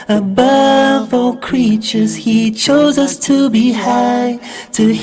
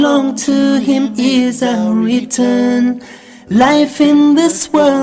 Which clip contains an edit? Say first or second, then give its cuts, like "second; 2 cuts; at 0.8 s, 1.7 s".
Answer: first; 1 cut; at 3.9 s